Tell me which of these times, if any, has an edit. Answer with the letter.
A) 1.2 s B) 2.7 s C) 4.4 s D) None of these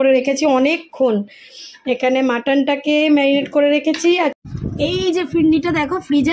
C